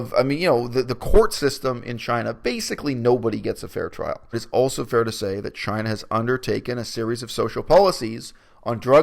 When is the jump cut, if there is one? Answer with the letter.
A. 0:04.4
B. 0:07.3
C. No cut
A